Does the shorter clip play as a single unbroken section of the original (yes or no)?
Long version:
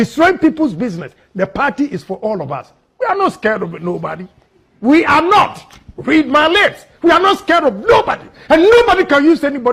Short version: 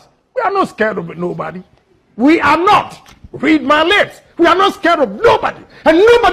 yes